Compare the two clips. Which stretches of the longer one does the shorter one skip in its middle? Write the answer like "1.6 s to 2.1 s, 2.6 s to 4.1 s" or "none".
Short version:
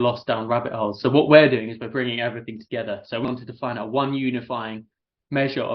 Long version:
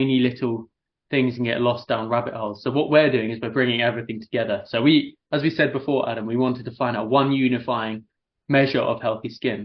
4.9 s to 6.4 s